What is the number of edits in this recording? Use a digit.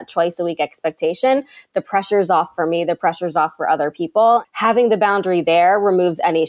1